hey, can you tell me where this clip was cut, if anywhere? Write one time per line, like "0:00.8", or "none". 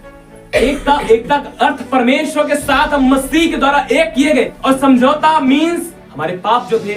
0:04.6
0:06.0